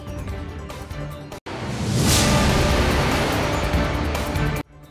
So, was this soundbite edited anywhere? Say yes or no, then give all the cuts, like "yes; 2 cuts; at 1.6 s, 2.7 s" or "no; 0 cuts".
no; 0 cuts